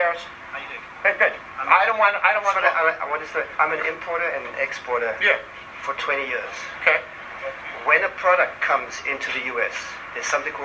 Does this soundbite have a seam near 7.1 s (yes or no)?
no